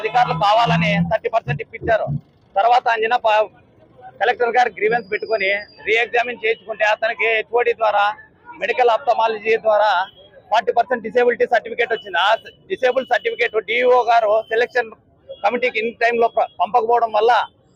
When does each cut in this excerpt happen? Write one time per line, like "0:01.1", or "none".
none